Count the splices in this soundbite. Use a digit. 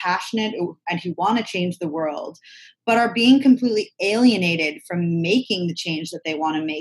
0